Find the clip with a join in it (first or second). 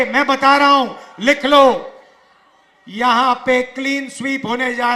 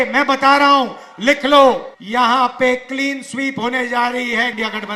second